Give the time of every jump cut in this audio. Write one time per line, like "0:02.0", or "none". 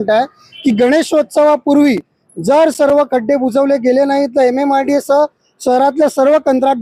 none